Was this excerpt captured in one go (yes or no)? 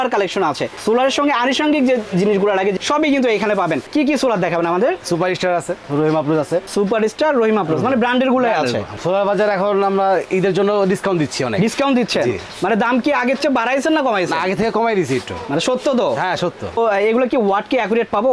no